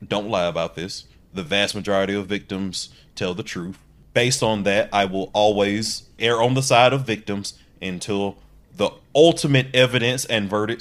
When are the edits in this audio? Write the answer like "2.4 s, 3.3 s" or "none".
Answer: 3.9 s, 6.1 s